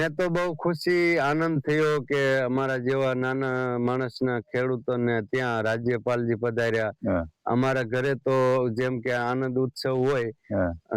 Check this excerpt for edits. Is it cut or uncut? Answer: uncut